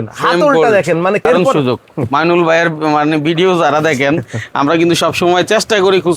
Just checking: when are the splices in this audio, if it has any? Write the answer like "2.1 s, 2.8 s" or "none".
1.2 s